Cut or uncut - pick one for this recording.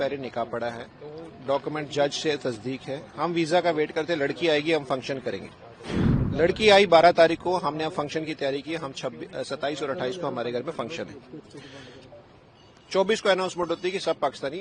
uncut